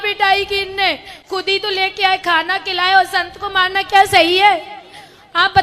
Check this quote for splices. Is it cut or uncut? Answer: uncut